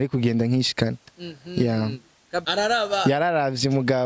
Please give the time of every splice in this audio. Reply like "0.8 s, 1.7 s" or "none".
2.4 s